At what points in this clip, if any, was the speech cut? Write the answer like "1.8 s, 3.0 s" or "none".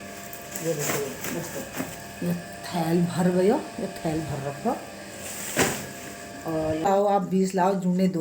6.9 s